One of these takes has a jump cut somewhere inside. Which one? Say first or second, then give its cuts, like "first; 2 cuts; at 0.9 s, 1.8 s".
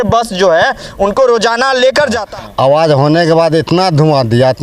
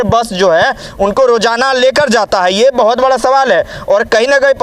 first; 1 cut; at 2.2 s